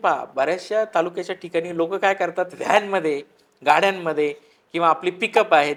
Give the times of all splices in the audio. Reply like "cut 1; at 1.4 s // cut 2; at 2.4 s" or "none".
none